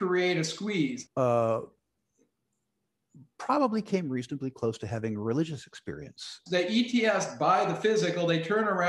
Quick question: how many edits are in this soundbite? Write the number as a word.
zero